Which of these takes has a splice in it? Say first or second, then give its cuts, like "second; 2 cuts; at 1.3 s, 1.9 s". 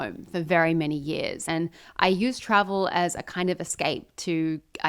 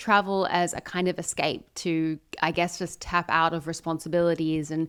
first; 1 cut; at 1.4 s